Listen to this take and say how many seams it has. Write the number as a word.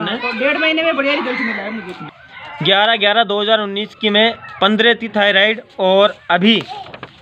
one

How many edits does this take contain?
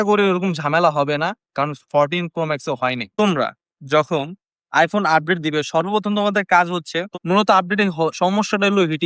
two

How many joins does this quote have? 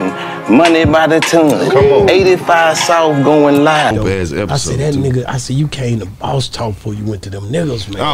zero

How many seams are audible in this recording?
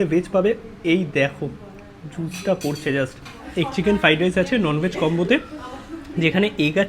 one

